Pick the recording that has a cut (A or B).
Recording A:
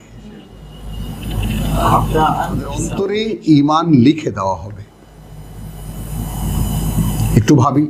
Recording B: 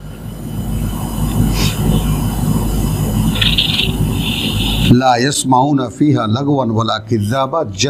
A